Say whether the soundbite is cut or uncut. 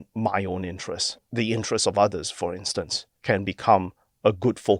cut